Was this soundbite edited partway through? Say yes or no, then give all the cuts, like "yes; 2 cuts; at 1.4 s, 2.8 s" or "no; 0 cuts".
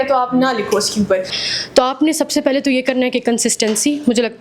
yes; 1 cut; at 1.4 s